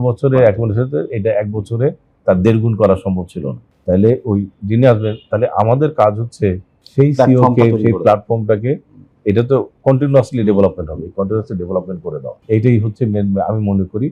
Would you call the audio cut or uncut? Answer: uncut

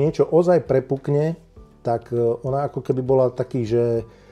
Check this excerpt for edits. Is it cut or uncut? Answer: uncut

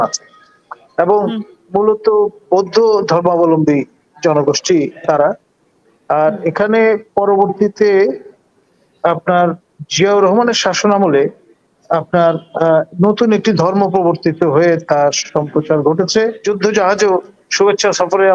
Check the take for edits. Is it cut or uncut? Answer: cut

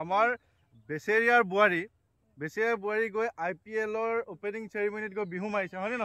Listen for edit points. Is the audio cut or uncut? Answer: uncut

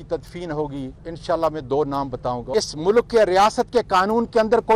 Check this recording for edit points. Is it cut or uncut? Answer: cut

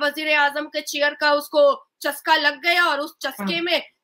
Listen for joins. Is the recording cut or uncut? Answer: uncut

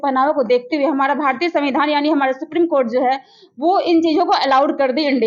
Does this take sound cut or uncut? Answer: uncut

